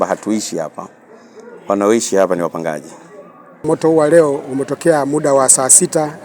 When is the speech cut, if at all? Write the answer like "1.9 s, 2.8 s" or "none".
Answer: 3.6 s